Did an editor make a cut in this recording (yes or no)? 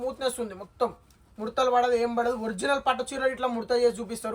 no